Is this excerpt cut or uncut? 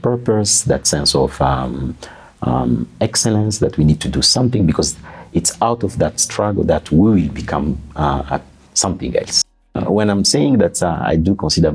cut